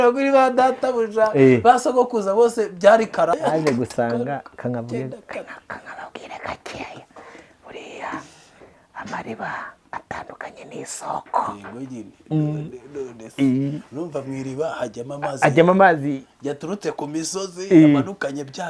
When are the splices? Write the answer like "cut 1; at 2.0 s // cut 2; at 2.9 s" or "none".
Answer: cut 1; at 3.3 s